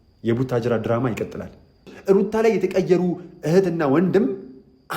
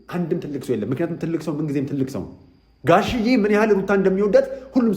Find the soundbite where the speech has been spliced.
first; 1 cut; at 1.9 s

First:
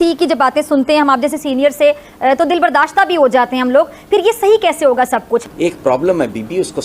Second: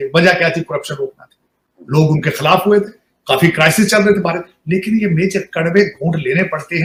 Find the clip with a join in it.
first; 1 cut; at 5.5 s

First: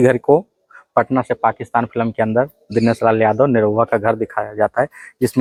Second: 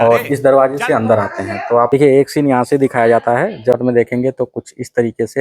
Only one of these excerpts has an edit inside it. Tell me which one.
second; 2 cuts; at 1.9 s, 3.8 s

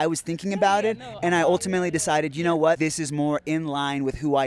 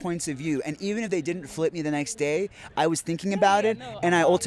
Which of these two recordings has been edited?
first; 1 cut; at 2.8 s

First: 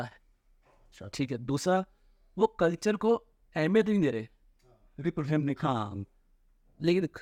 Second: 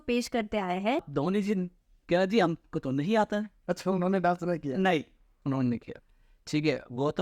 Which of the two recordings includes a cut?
second; 1 cut; at 1.1 s

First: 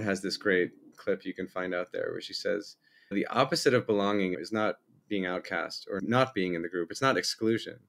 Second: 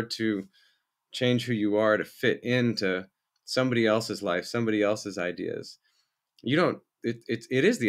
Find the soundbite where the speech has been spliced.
first; 4 cuts; at 1.0 s, 3.1 s, 4.3 s, 6.0 s

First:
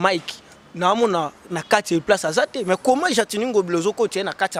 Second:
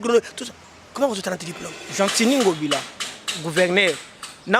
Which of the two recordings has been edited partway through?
second; 1 cut; at 1.8 s

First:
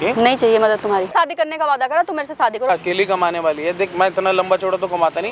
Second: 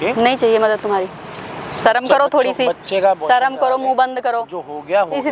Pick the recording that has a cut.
first; 2 cuts; at 1.1 s, 2.7 s

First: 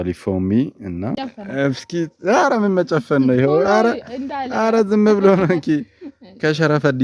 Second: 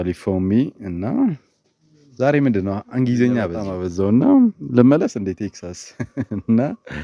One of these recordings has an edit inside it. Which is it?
first; 1 cut; at 1.1 s

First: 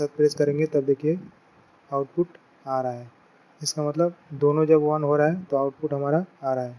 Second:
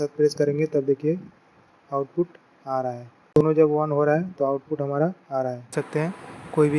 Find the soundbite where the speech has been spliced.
second; 2 cuts; at 3.4 s, 5.7 s

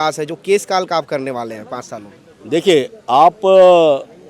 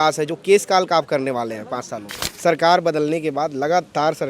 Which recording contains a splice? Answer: second; 1 cut; at 2.2 s

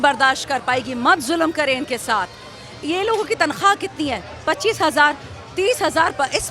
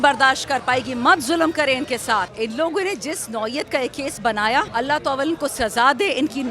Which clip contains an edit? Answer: second; 2 cuts; at 2.3 s, 4.7 s

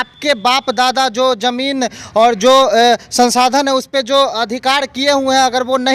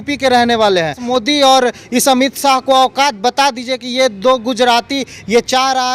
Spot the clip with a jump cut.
second; 1 cut; at 1.0 s

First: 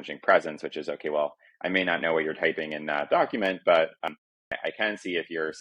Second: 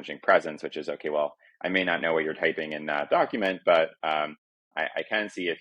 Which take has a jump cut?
first; 1 cut; at 4.1 s

